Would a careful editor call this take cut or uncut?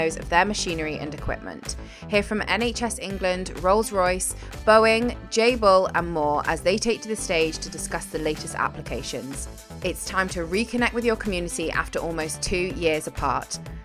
uncut